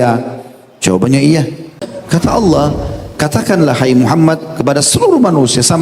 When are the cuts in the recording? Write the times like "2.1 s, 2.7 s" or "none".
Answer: 1.9 s